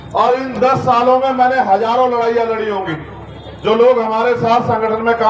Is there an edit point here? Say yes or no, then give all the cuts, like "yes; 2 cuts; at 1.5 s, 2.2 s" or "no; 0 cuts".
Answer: no; 0 cuts